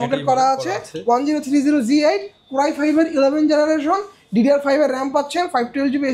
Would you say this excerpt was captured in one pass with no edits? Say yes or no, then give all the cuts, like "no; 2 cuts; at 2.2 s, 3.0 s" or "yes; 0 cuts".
yes; 0 cuts